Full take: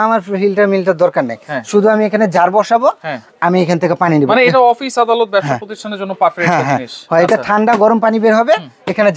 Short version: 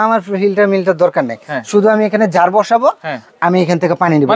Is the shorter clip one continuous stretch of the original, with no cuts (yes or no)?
yes